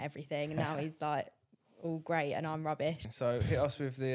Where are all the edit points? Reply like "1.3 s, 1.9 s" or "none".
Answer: 3.1 s